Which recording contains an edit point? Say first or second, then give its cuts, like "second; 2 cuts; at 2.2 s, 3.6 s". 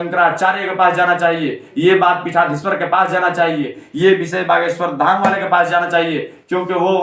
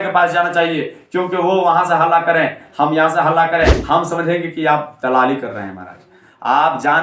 second; 1 cut; at 3.8 s